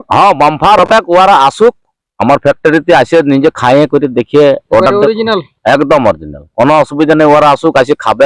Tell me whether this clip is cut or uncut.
uncut